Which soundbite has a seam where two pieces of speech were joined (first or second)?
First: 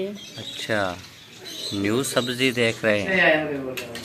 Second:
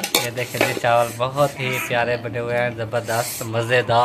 first